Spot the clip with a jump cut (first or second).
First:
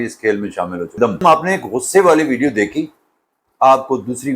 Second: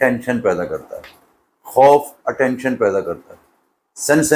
first